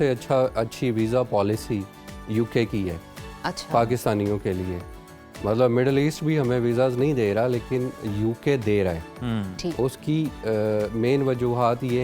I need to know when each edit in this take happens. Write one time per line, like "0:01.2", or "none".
none

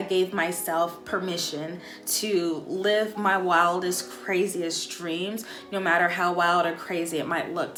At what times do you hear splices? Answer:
none

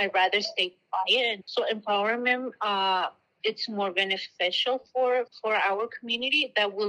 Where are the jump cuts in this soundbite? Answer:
0:01.4
0:03.3
0:05.3

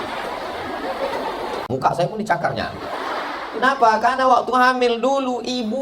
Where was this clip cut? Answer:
0:01.7

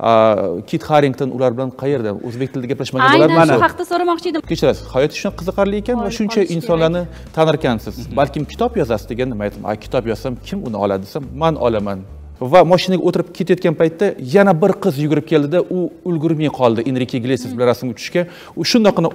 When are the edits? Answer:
0:04.4
0:12.2

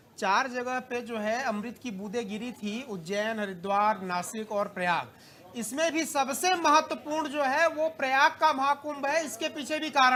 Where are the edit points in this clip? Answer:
none

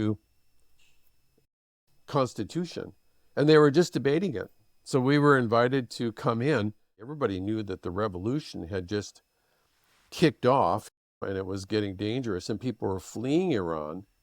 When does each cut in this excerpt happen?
0:07.1

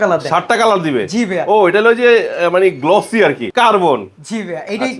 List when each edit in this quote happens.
0:03.4

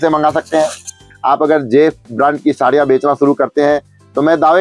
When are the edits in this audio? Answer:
0:01.0

